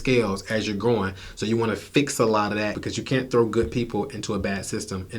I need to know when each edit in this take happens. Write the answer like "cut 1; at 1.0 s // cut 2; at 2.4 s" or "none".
cut 1; at 2.8 s